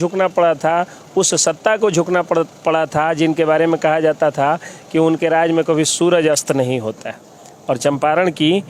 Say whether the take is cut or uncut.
uncut